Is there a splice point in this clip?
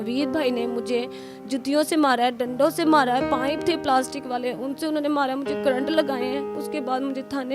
yes; 1 cut; at 6.6 s

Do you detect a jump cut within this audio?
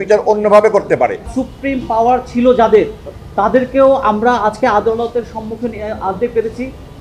yes; 1 cut; at 1.3 s

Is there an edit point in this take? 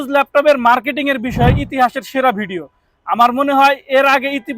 no; 0 cuts

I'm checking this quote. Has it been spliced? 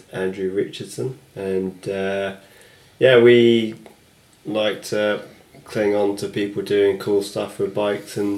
no; 0 cuts

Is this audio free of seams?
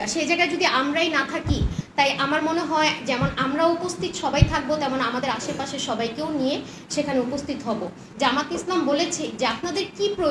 no; 2 cuts; at 1.8 s, 8.0 s

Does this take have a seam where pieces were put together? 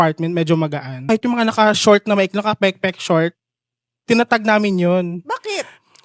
yes; 1 cut; at 1.1 s

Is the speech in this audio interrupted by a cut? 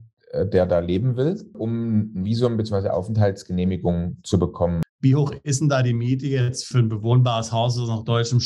yes; 2 cuts; at 4.8 s, 6.7 s

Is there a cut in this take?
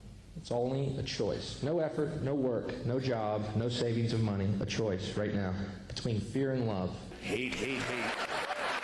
yes; 1 cut; at 7.1 s

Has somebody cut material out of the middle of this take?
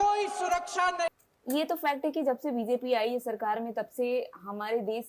no; 0 cuts

